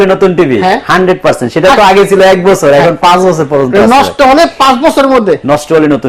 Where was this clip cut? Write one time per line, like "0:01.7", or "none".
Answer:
none